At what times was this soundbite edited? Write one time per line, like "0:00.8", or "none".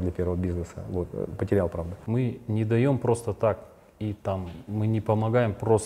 0:02.0